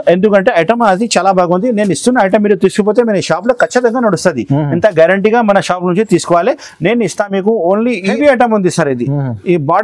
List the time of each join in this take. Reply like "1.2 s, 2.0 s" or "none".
8.1 s